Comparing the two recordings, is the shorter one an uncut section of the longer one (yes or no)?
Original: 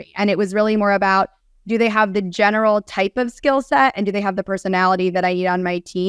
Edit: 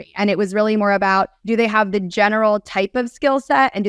no